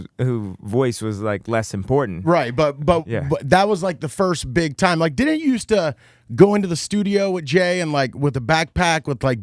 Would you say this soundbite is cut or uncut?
cut